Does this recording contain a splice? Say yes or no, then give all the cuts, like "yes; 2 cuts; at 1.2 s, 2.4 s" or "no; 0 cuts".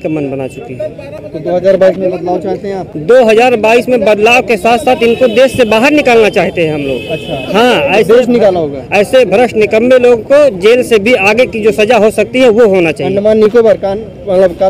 no; 0 cuts